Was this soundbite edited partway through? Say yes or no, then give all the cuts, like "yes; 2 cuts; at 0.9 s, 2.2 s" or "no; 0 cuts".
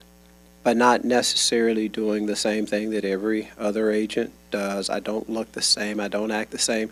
no; 0 cuts